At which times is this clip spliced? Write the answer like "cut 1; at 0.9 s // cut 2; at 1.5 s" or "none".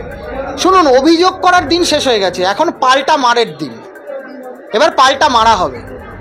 none